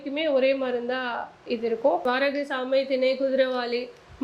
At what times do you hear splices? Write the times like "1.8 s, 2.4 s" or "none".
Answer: 2.0 s